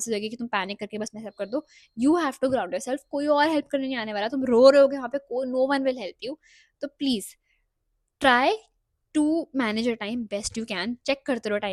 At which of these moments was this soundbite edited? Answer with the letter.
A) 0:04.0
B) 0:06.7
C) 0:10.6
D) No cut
D